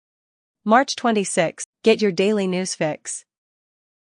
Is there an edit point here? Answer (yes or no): yes